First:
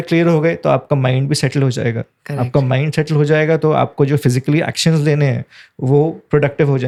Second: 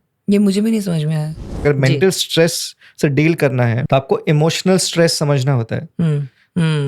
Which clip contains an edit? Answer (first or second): second